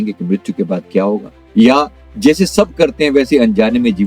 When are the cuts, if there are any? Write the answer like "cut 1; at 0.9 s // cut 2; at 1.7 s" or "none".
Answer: cut 1; at 1.4 s // cut 2; at 2.0 s